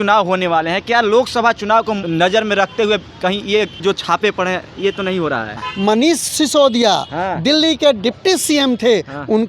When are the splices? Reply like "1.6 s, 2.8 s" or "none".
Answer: 2.0 s, 3.8 s, 5.7 s